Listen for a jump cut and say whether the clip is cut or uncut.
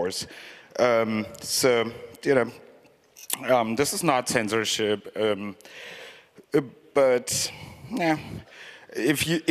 cut